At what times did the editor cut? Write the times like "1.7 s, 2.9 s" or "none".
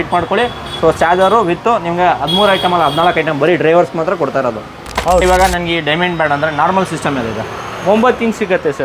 5.2 s